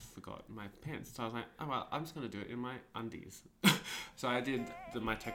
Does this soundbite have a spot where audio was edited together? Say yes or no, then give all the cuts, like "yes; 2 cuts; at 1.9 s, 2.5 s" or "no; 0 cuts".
no; 0 cuts